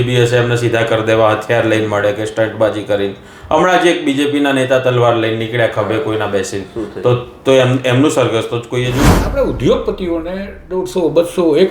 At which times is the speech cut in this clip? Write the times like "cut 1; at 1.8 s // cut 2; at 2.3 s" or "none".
cut 1; at 9.0 s